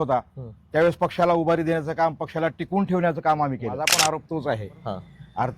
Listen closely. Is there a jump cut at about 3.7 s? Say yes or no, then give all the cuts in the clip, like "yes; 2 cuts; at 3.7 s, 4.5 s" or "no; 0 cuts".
yes; 1 cut; at 3.7 s